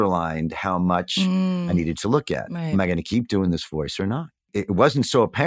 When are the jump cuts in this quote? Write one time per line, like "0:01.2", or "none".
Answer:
0:02.6
0:04.5